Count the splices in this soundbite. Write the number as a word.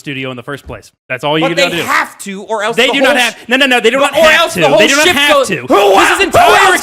one